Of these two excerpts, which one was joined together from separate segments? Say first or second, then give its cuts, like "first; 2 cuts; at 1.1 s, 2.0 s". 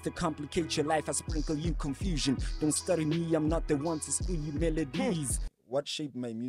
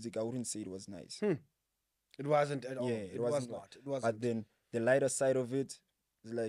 first; 1 cut; at 5.5 s